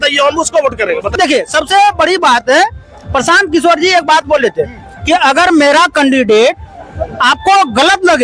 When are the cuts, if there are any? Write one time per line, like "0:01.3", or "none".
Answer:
0:01.1